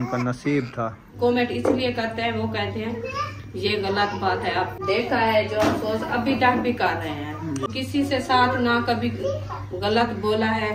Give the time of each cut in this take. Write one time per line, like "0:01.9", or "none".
0:01.1
0:04.7
0:07.7